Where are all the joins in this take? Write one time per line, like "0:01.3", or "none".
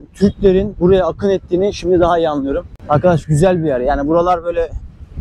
none